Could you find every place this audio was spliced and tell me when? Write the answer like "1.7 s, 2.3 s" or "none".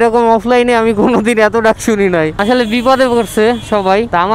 none